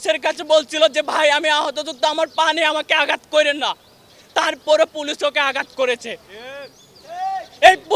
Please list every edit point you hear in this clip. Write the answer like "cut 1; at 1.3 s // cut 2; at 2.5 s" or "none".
none